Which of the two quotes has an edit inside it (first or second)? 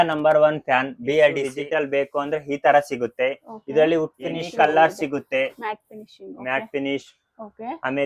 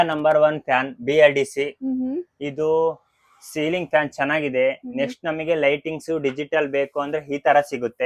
first